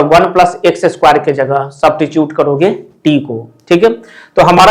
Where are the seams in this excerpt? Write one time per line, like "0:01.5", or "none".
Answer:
none